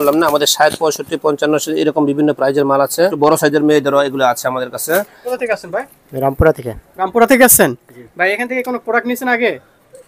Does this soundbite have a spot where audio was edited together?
yes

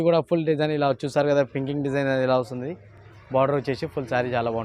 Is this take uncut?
yes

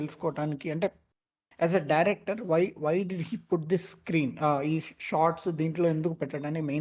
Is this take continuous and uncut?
yes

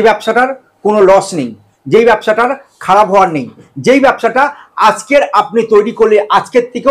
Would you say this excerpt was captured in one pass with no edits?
yes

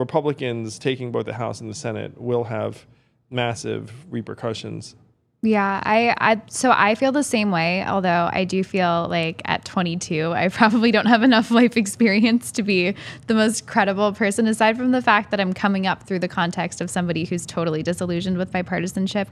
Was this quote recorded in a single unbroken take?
yes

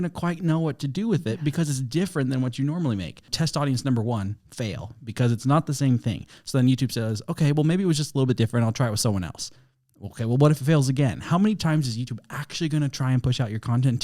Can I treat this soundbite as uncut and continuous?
no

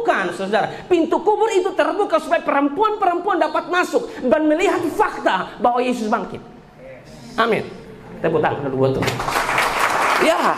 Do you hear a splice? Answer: no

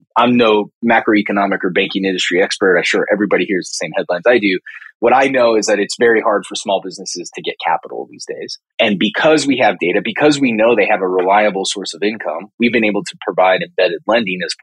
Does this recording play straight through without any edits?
yes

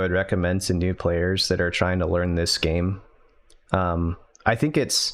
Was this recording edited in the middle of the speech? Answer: no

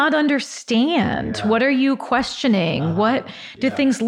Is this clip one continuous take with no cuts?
yes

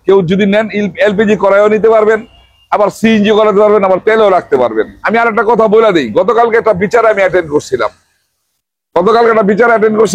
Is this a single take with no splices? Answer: no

